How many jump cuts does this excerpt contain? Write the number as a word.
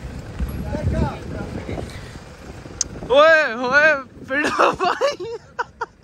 zero